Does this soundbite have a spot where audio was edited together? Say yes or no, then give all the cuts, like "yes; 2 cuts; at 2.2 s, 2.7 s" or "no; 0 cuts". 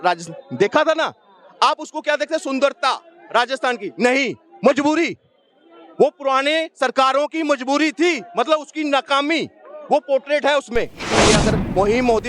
yes; 1 cut; at 11.1 s